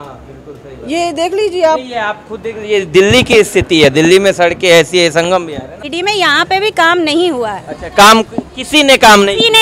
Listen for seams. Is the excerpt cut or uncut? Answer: cut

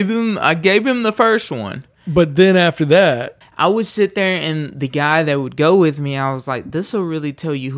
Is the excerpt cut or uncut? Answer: cut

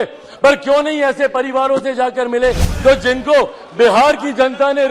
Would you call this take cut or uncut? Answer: cut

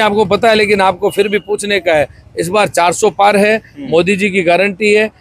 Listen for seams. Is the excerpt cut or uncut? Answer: uncut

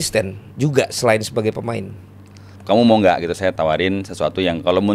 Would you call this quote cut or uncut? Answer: cut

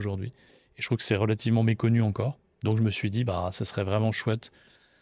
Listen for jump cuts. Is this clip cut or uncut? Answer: uncut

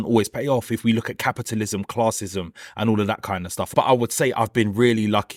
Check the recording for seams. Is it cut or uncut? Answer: uncut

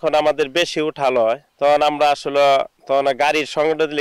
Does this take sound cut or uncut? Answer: cut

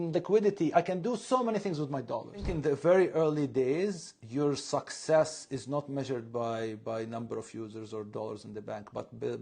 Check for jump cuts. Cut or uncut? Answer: cut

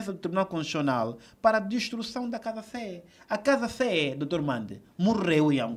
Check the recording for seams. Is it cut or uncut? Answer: uncut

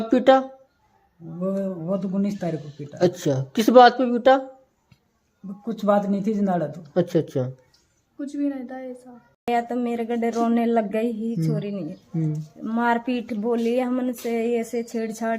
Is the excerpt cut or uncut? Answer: cut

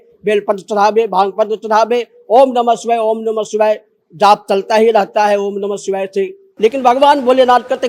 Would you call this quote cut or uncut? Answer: cut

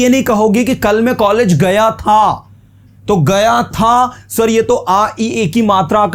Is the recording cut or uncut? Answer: uncut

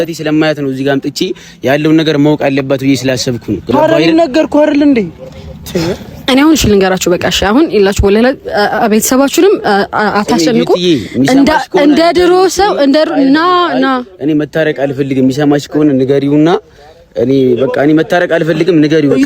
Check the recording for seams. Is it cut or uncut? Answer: cut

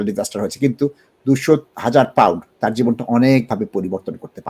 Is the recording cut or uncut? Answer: cut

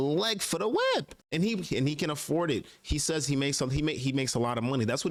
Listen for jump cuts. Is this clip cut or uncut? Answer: uncut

